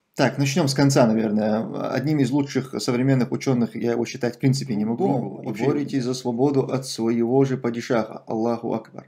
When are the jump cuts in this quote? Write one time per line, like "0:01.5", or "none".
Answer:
0:05.4